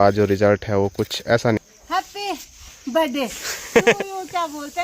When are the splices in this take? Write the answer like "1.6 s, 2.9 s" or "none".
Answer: 1.6 s